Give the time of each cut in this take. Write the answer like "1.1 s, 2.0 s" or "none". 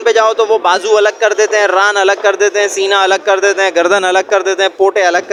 none